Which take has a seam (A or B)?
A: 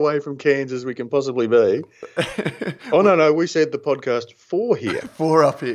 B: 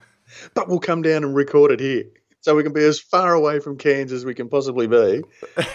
B